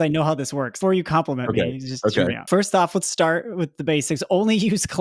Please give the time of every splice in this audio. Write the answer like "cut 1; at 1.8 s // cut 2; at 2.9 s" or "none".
cut 1; at 0.8 s // cut 2; at 2.4 s